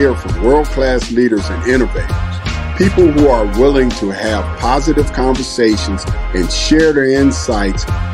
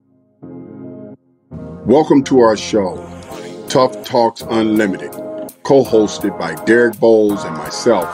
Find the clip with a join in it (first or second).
second